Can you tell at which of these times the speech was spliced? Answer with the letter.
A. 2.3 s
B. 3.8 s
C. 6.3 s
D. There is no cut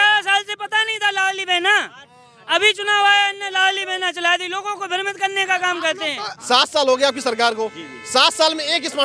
C